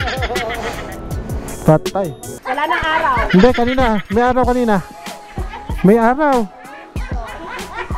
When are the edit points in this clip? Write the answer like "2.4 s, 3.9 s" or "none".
2.3 s